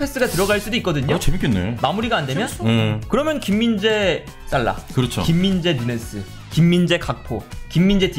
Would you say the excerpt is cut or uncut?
uncut